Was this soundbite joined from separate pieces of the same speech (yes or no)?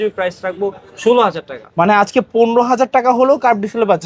no